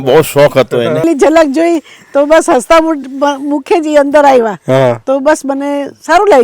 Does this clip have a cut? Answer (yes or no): yes